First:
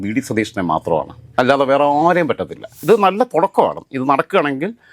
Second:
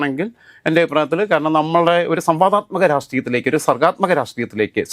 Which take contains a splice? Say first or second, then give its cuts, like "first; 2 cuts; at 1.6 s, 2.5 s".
first; 1 cut; at 2.8 s